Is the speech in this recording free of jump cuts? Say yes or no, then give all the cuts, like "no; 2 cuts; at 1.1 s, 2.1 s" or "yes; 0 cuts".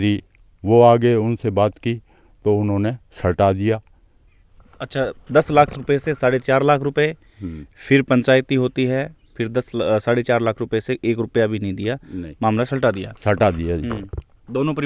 yes; 0 cuts